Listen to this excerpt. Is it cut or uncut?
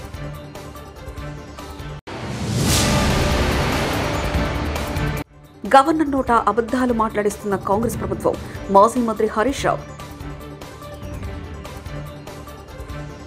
cut